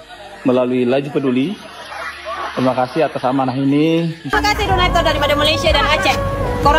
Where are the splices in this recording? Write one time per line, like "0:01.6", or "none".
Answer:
0:04.3